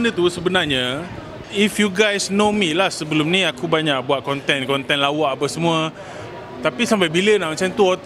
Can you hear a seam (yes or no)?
yes